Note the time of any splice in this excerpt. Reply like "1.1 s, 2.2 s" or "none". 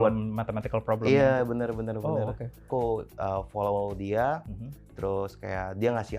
2.7 s